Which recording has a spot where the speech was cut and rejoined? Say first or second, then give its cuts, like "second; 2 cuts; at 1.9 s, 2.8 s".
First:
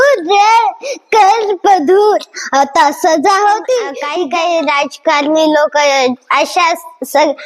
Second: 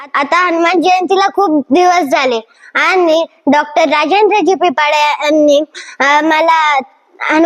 first; 1 cut; at 4.0 s